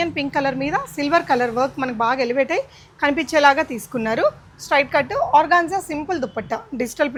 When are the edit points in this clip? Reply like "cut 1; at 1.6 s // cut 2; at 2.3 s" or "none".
none

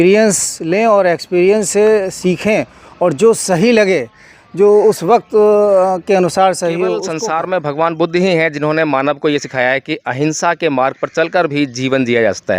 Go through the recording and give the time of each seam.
cut 1; at 7.1 s

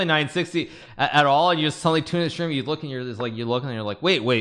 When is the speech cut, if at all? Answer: none

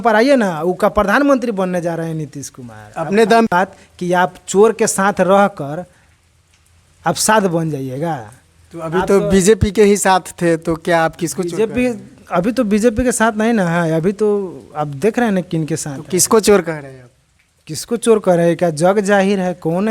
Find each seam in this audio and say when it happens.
cut 1; at 3.5 s

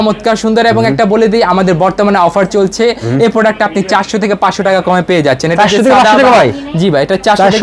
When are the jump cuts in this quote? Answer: none

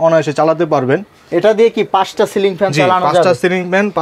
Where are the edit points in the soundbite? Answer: none

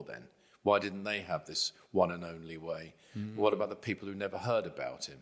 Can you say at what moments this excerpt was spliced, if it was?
none

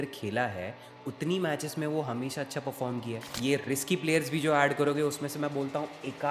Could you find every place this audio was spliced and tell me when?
cut 1; at 3.3 s

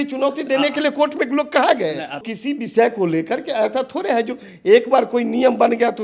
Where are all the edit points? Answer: cut 1; at 2.2 s

